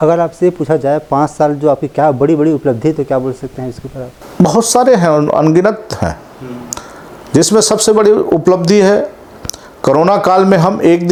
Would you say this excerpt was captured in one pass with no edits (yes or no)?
yes